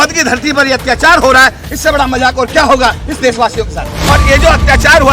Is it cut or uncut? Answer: cut